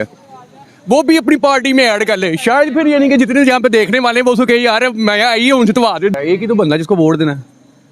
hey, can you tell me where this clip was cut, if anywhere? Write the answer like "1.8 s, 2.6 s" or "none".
6.1 s